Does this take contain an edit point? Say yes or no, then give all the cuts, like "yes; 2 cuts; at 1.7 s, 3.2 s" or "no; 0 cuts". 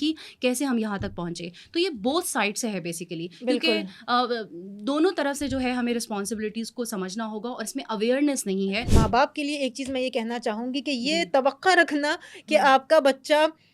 yes; 1 cut; at 8.8 s